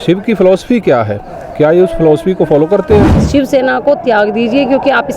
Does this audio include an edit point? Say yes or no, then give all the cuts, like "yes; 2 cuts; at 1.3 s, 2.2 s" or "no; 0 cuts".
yes; 1 cut; at 3.2 s